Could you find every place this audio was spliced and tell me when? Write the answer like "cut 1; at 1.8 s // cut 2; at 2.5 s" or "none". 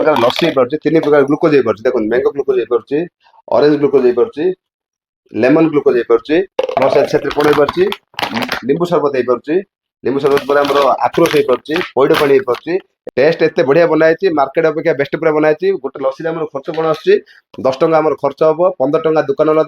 cut 1; at 13.0 s

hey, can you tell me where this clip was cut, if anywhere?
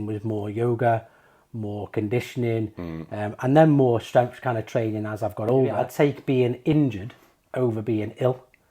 cut 1; at 5.9 s

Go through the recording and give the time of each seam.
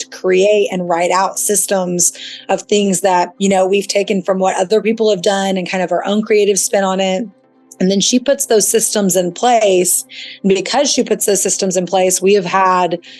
cut 1; at 3.3 s

